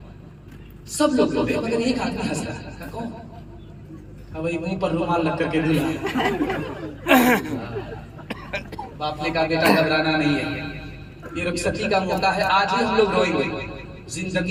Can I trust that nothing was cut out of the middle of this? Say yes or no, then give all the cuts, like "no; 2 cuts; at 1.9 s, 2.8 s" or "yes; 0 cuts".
yes; 0 cuts